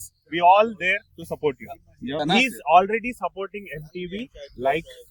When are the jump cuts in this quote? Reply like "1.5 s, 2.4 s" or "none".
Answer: 2.2 s